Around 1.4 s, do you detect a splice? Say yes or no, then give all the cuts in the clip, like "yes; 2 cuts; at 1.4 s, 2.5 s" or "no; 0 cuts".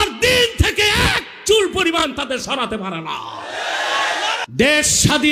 no; 1 cut; at 4.4 s